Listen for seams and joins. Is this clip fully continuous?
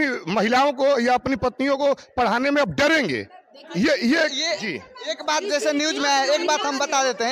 yes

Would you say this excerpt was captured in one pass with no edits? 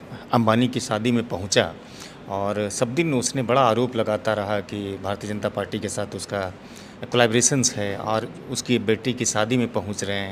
yes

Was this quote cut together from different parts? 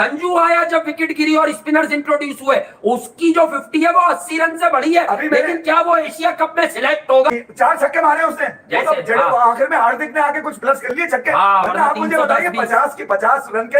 no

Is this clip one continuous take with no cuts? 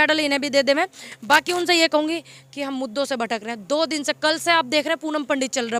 yes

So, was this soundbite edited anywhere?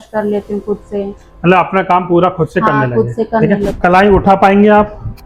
yes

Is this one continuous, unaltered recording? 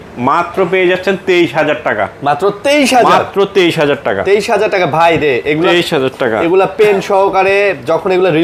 yes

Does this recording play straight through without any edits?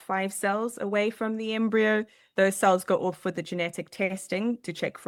yes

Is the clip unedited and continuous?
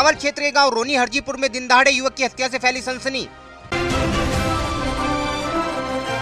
yes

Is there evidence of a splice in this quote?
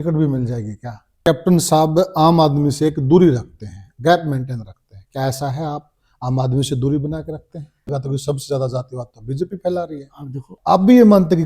yes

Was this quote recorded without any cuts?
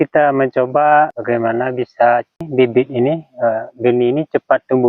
no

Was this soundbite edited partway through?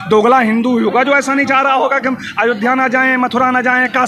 no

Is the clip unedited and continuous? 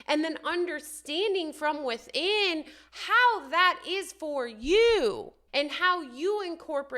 no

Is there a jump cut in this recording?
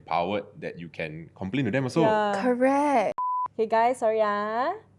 yes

